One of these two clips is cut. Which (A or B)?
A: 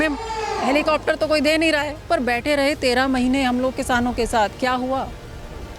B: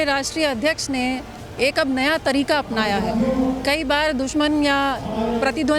A